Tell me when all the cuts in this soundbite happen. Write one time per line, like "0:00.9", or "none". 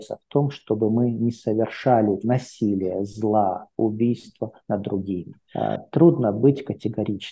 0:05.4